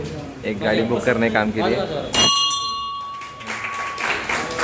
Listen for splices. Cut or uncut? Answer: uncut